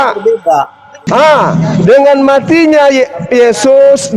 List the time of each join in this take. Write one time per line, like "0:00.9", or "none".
0:01.1